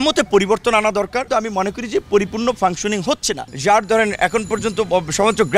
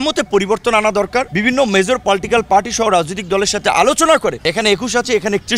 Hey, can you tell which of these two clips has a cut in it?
first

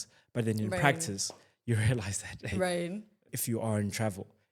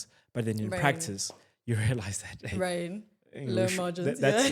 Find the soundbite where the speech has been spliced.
first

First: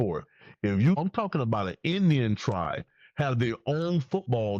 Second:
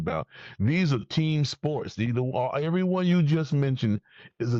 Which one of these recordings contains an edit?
first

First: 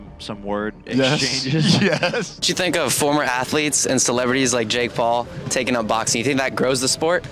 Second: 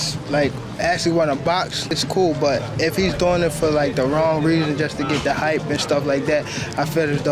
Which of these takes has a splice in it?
first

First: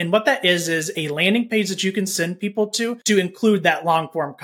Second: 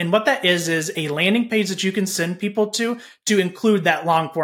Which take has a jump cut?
first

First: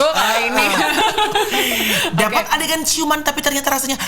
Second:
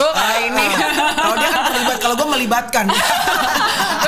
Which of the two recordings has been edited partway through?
first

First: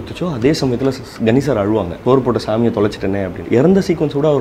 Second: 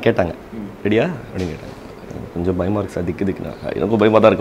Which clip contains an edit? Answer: first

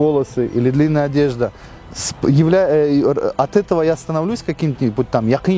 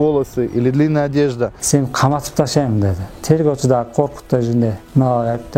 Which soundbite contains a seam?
second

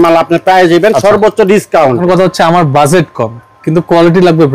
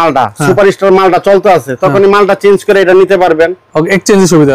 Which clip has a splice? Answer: first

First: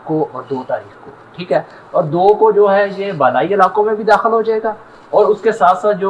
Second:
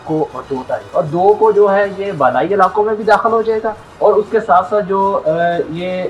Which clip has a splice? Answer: second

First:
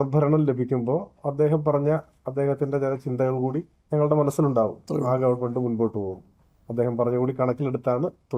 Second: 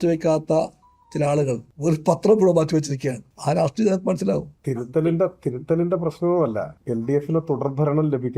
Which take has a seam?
second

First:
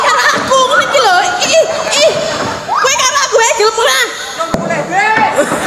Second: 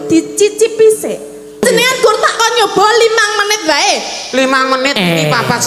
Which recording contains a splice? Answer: second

